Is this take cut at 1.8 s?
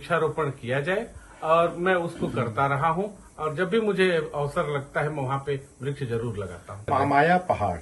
no; 1 cut; at 6.8 s

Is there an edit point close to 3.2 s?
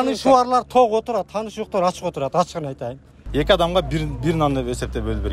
yes; 1 cut; at 3.2 s

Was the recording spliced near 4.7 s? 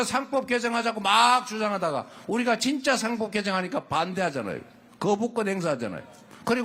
no; 0 cuts

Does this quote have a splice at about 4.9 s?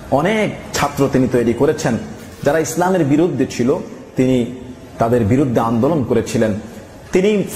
no; 1 cut; at 2.2 s

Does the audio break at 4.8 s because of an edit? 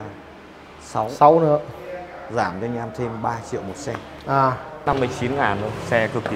yes; 1 cut; at 4.8 s

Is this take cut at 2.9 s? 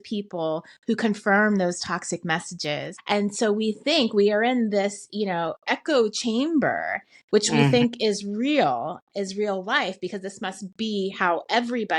yes; 1 cut; at 2.9 s

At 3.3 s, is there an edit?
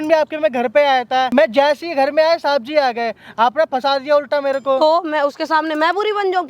no; 1 cut; at 1.3 s

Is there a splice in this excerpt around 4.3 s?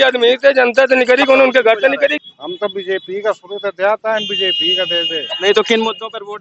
no; 1 cut; at 2.2 s

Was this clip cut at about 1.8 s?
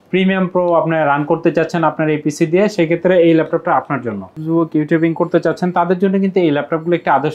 no; 1 cut; at 4.3 s

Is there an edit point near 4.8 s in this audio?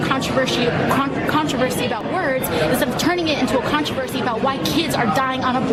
no; 0 cuts

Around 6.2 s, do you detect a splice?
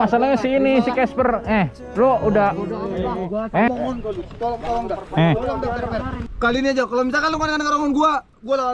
yes; 2 cuts; at 3.7 s, 6.2 s

